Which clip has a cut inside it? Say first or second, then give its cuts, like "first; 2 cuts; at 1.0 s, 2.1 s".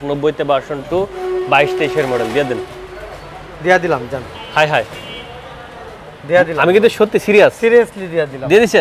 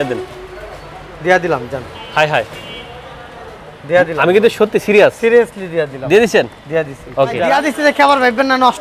second; 1 cut; at 7.4 s